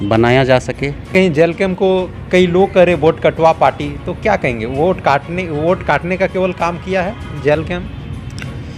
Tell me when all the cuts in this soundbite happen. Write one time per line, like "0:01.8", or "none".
0:01.0